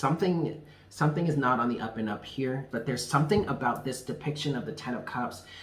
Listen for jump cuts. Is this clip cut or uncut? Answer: cut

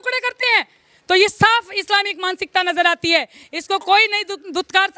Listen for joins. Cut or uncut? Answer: uncut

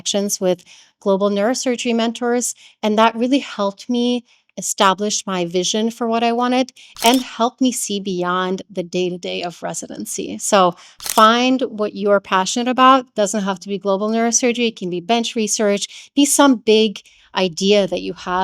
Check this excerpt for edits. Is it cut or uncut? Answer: uncut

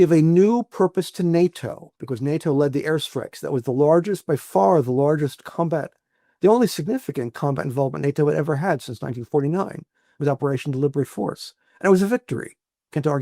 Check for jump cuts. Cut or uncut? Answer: uncut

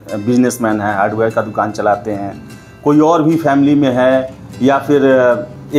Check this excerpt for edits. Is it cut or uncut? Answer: uncut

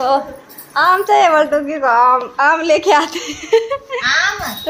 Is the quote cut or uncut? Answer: uncut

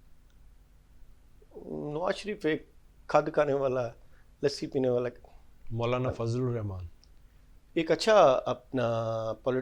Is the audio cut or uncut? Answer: uncut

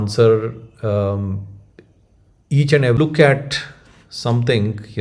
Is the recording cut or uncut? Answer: cut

